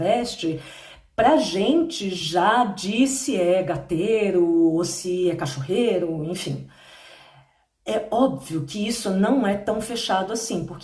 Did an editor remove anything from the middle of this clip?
no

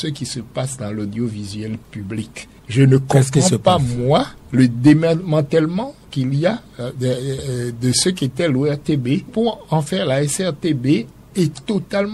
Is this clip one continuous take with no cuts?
no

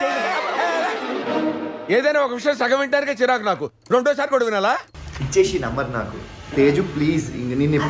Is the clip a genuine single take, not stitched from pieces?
yes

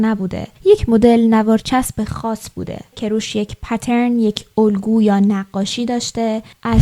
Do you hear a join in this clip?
no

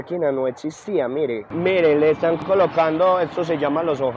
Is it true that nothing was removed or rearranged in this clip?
no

